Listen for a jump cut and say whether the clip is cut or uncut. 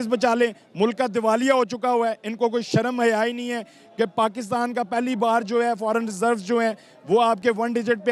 uncut